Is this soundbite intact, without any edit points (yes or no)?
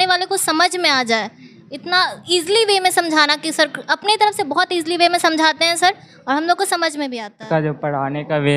no